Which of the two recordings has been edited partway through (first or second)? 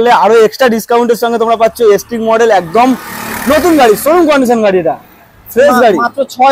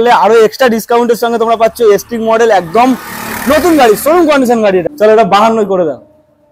second